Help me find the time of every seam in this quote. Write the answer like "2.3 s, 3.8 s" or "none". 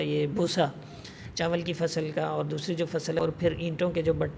3.2 s